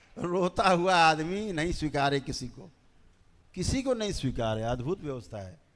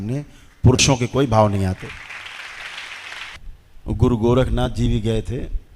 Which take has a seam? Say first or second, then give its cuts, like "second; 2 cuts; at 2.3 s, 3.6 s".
second; 1 cut; at 3.4 s